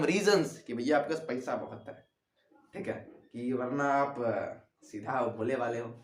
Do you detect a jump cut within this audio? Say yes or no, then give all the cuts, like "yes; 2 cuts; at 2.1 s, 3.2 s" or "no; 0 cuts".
no; 0 cuts